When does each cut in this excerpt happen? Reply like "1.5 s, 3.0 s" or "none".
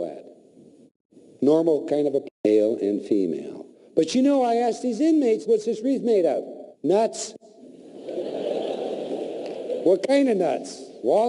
2.2 s